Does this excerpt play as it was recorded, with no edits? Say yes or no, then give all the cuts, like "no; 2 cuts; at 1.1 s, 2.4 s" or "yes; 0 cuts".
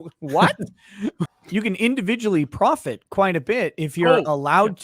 no; 1 cut; at 1.3 s